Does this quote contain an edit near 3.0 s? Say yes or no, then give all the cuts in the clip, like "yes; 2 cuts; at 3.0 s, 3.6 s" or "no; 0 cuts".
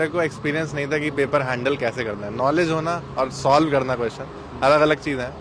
no; 0 cuts